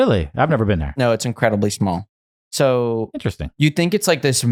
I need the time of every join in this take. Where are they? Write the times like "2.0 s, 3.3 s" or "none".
none

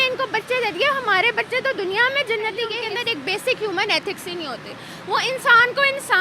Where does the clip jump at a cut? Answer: 2.8 s

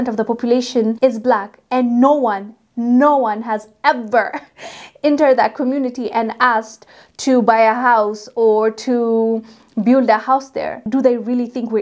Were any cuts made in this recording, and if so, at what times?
10.8 s

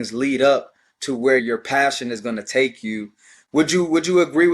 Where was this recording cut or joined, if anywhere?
1.4 s

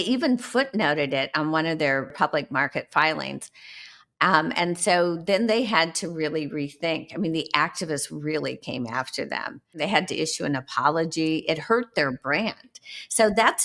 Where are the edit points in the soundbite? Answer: 2.1 s, 9.8 s

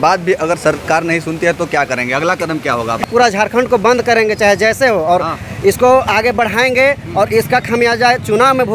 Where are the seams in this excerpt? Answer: 3.0 s

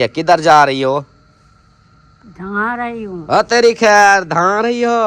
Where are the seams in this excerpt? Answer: none

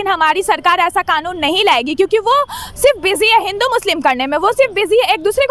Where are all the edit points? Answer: none

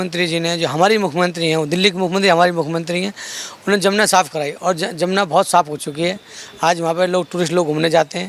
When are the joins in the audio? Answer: none

